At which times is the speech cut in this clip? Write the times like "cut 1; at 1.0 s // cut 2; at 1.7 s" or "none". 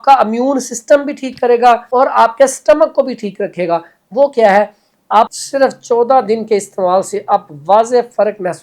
cut 1; at 1.9 s // cut 2; at 5.3 s